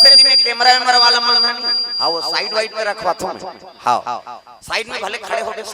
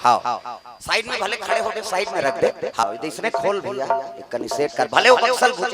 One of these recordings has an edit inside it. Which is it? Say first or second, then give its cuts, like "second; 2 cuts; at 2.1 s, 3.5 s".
second; 1 cut; at 2.8 s